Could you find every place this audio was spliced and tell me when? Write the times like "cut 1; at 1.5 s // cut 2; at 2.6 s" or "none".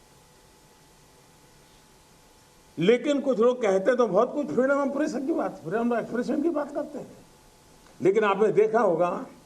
cut 1; at 1.2 s